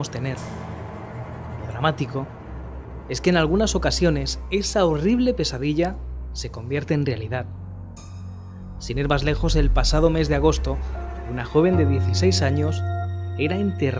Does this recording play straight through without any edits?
yes; 0 cuts

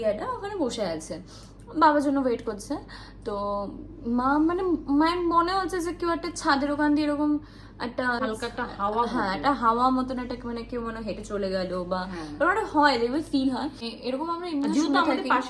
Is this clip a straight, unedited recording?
no; 2 cuts; at 8.2 s, 13.9 s

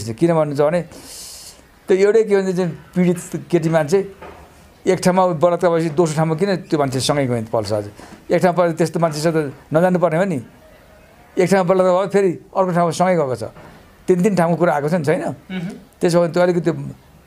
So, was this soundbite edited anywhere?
no; 0 cuts

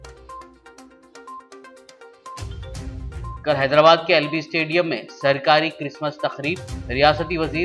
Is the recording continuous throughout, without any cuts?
yes; 0 cuts

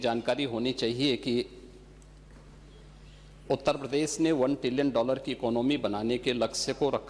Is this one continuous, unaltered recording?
yes; 0 cuts

